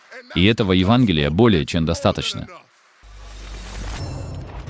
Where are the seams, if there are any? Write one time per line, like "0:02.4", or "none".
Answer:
0:02.5